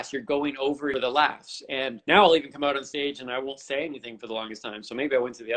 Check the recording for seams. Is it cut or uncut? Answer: cut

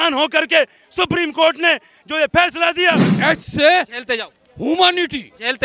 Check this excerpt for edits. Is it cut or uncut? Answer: cut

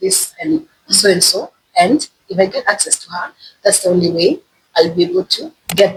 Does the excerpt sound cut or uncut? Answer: uncut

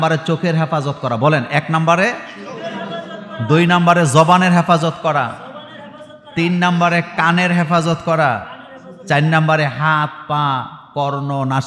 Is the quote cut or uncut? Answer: uncut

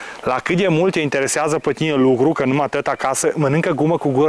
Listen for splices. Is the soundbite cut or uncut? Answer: uncut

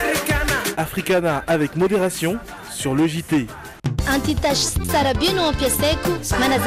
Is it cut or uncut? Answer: cut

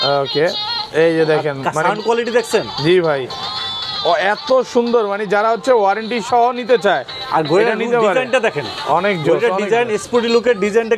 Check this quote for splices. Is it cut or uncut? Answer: uncut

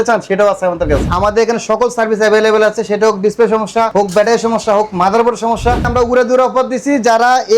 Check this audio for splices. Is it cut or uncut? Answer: cut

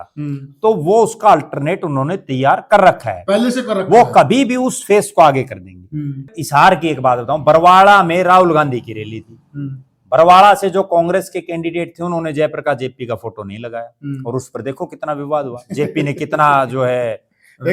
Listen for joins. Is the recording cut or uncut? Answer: cut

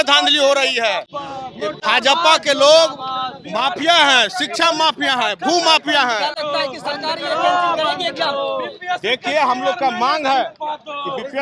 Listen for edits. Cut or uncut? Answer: uncut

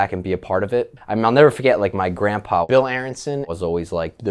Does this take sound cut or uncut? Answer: cut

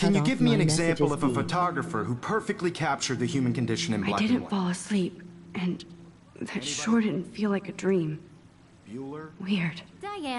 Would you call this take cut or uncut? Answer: uncut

